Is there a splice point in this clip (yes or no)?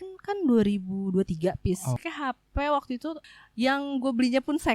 yes